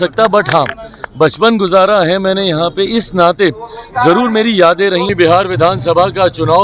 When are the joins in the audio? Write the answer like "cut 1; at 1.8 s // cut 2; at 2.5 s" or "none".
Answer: cut 1; at 5.1 s